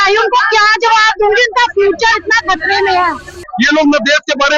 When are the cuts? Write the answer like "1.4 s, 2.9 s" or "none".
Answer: 3.4 s